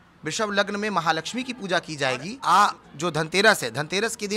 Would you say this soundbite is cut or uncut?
cut